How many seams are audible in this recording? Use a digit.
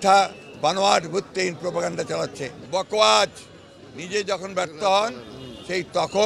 1